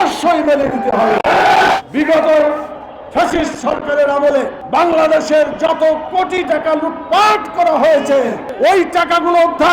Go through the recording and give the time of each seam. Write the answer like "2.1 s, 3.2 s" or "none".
1.8 s, 4.6 s, 8.5 s